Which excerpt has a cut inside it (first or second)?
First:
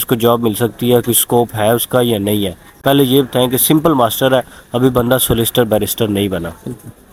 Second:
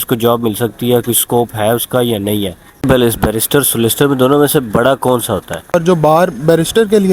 second